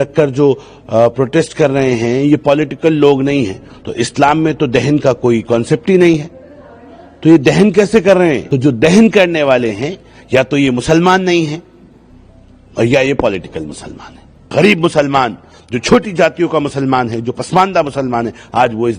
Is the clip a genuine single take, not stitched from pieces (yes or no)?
no